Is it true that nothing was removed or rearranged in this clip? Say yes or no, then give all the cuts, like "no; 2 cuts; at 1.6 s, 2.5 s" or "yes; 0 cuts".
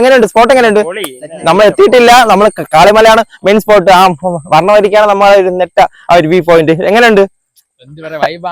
yes; 0 cuts